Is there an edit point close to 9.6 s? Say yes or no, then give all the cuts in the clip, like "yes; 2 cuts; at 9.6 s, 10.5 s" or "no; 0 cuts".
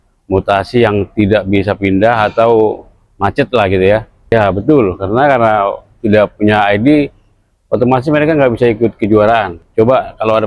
yes; 2 cuts; at 4.3 s, 9.6 s